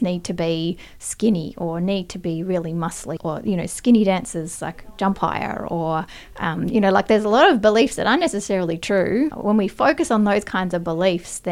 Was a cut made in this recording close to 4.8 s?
no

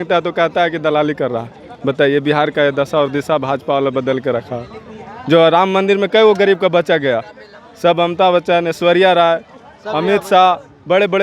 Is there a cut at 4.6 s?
no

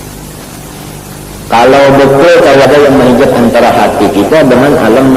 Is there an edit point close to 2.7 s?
yes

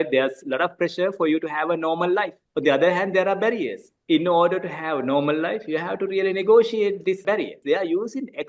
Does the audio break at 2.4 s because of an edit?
yes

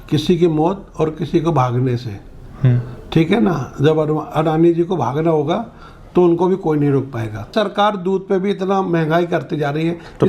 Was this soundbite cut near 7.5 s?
yes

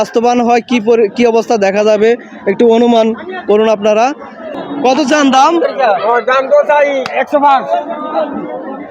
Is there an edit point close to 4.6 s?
yes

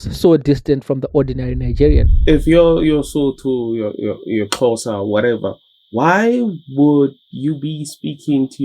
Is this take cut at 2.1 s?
yes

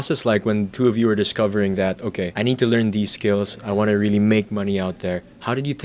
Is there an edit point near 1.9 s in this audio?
no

